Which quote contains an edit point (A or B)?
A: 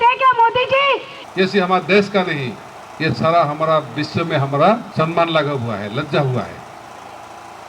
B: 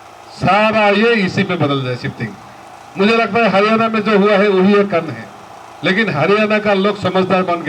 A